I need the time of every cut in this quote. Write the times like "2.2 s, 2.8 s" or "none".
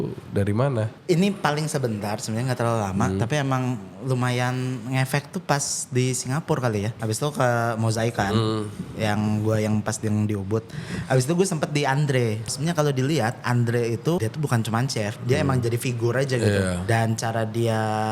0.9 s, 7.0 s, 12.5 s, 14.2 s, 16.8 s